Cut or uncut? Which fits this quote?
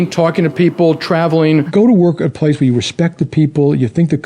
cut